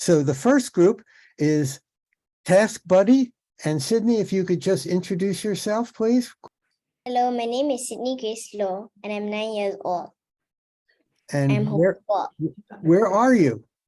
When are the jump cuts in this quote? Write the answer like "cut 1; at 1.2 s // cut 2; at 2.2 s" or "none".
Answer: cut 1; at 6.4 s

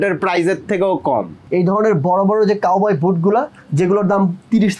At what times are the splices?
cut 1; at 1.4 s

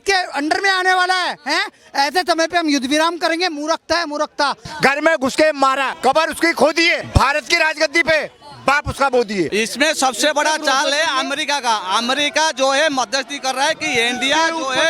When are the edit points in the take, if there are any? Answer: cut 1; at 4.7 s // cut 2; at 5.9 s // cut 3; at 7.0 s // cut 4; at 9.5 s

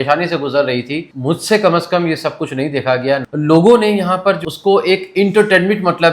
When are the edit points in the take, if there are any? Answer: cut 1; at 1.0 s // cut 2; at 3.3 s // cut 3; at 4.4 s

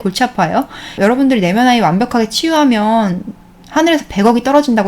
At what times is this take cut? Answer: cut 1; at 1.0 s

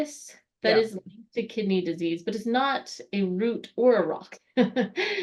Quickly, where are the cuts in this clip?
none

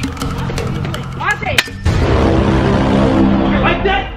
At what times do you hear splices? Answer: cut 1; at 1.0 s

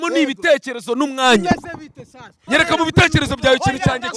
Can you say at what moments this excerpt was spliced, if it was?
cut 1; at 2.4 s

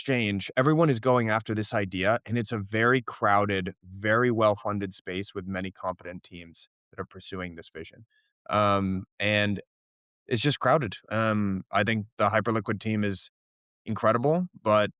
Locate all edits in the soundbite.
none

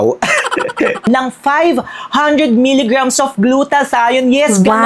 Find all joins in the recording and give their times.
cut 1; at 1.1 s

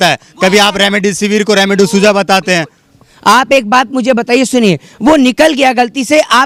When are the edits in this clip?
none

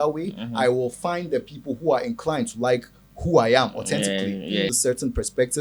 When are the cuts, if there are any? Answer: cut 1; at 4.7 s

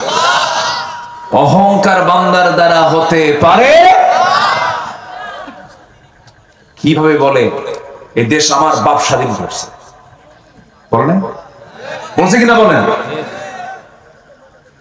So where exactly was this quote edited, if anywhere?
none

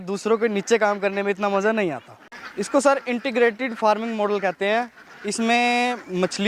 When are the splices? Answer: cut 1; at 2.5 s

